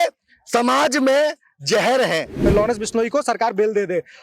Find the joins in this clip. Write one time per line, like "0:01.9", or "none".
0:02.4